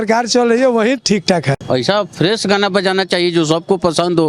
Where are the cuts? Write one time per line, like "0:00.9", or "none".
0:01.6